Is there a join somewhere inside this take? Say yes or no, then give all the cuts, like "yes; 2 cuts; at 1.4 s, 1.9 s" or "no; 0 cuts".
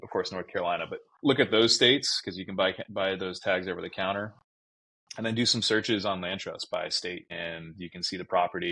no; 0 cuts